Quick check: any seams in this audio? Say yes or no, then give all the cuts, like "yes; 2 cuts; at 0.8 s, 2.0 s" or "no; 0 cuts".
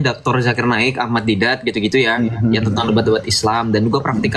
no; 0 cuts